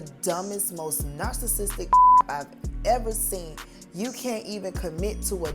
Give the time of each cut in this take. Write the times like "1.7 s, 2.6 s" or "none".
3.8 s